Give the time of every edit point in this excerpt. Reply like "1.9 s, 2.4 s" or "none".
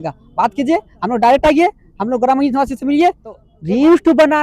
3.5 s